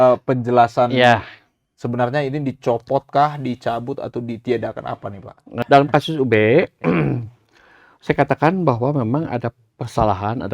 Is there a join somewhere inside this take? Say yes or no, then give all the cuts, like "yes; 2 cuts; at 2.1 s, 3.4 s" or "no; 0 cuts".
yes; 1 cut; at 5.6 s